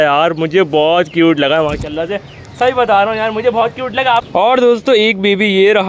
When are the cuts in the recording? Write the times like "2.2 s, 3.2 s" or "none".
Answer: 4.3 s